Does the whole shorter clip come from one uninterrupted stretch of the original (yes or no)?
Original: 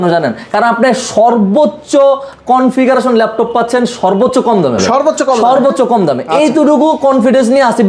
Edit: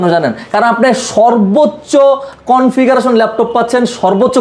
yes